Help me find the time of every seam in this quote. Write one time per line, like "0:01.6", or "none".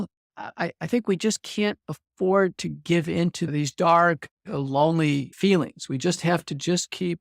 0:03.5
0:05.3